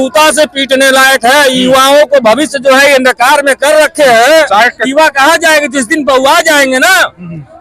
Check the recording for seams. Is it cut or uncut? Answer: uncut